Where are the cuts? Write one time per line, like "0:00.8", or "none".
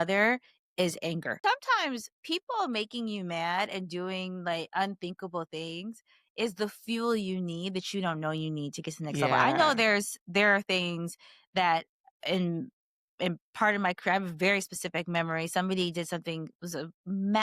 0:01.4